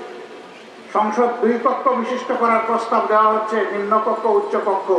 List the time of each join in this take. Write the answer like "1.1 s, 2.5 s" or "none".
none

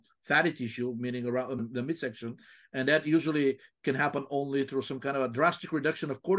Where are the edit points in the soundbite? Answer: 1.6 s

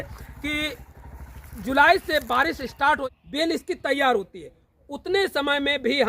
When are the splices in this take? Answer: 3.0 s

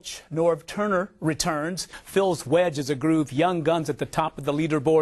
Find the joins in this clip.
1.9 s

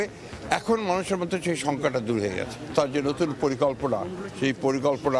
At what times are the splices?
2.7 s

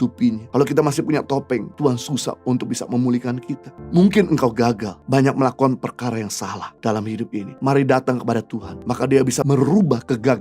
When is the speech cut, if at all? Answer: 9.4 s

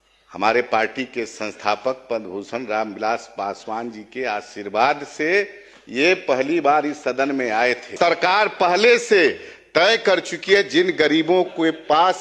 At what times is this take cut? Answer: 7.9 s

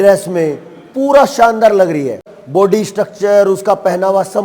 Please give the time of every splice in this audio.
2.3 s

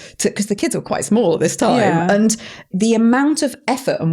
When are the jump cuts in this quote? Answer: 2.7 s

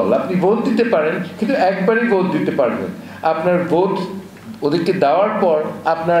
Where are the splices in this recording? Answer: none

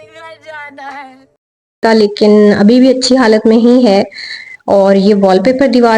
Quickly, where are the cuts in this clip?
1.8 s

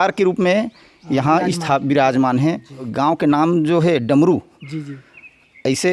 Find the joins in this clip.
2.8 s

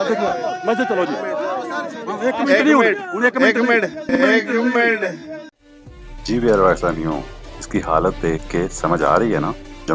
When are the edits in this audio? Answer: none

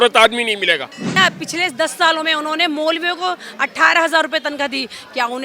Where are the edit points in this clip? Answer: 1.2 s

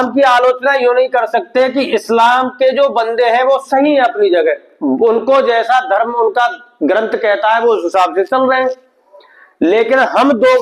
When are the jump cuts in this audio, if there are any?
none

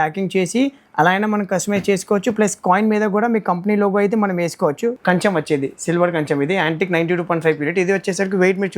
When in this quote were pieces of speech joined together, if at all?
5.0 s

